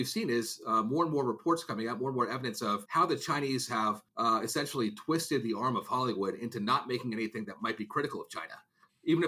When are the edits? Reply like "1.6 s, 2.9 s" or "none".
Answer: 2.8 s, 4.1 s